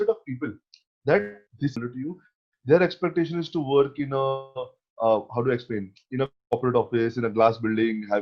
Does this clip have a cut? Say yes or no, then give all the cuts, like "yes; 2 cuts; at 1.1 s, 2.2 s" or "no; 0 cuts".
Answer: yes; 1 cut; at 1.8 s